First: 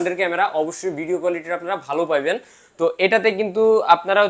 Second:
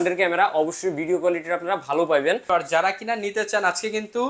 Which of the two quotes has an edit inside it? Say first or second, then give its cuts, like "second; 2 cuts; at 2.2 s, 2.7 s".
second; 1 cut; at 2.4 s